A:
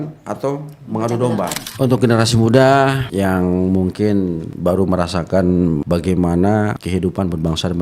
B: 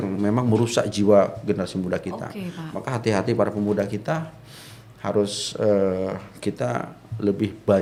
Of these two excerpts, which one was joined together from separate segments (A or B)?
A